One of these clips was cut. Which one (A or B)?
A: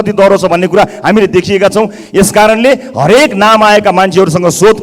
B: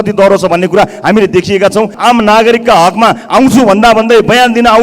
B